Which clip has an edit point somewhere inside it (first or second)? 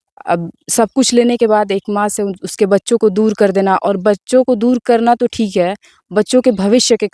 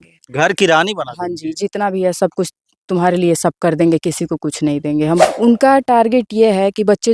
second